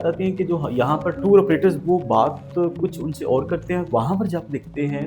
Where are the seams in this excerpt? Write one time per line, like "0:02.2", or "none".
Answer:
0:01.2